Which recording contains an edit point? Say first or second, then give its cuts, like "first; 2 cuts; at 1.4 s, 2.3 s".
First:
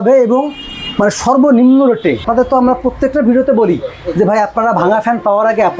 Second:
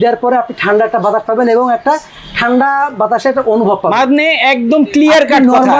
first; 1 cut; at 2.2 s